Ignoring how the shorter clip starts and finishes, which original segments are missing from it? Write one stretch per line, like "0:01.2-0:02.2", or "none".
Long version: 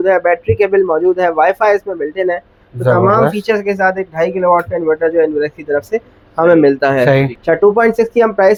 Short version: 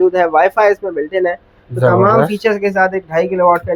none